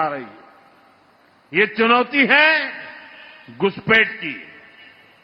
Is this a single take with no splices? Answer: yes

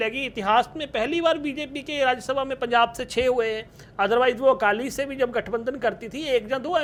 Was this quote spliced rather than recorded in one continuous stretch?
no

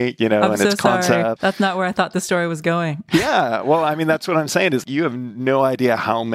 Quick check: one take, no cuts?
no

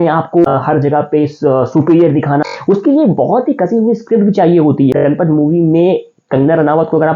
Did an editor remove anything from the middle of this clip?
yes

